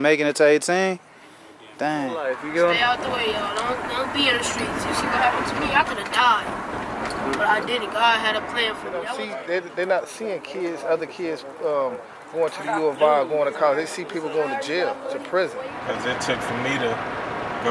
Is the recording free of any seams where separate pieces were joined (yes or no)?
no